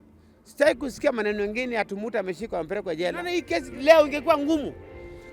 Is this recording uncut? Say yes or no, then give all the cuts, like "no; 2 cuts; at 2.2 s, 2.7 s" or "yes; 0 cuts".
no; 1 cut; at 3.2 s